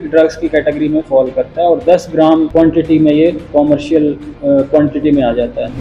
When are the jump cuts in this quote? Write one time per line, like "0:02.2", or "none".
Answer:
0:02.5
0:04.3